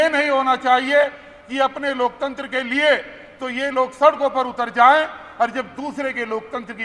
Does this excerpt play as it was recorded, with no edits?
yes; 0 cuts

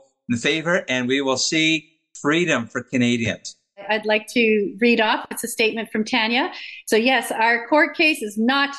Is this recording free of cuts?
no; 1 cut; at 3.9 s

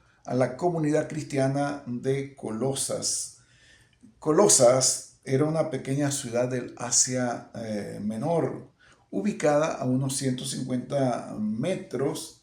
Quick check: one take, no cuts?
yes; 0 cuts

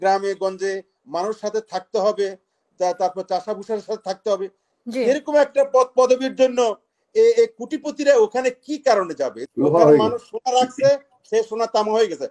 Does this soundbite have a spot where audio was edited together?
yes; 1 cut; at 9.4 s

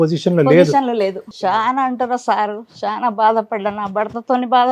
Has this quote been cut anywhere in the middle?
yes; 1 cut; at 1.2 s

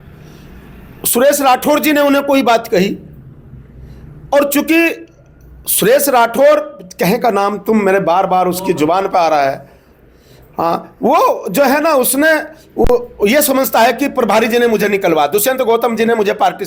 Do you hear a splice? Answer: no; 0 cuts

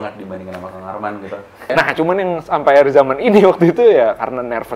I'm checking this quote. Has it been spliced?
yes; 1 cut; at 1.7 s

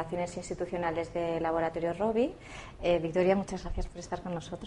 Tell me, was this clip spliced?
yes; 1 cut; at 1.4 s

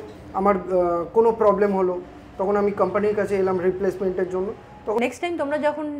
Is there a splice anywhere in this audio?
yes; 1 cut; at 5.0 s

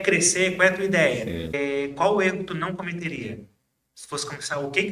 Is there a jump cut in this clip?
yes; 1 cut; at 1.5 s

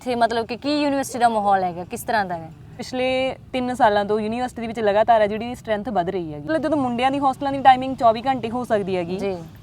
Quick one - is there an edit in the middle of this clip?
yes; 2 cuts; at 2.8 s, 6.5 s

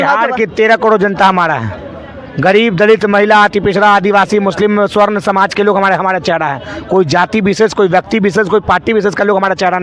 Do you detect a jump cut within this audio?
no; 0 cuts

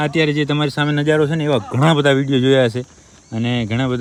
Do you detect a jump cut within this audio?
no; 0 cuts

